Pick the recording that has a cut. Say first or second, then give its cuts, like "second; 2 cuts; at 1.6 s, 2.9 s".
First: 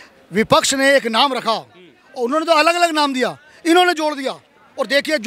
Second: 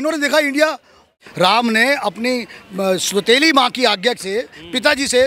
second; 1 cut; at 1.2 s